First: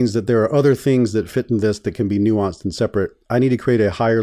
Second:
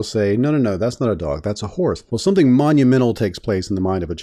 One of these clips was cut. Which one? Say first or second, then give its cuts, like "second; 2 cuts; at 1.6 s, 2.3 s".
second; 1 cut; at 2.0 s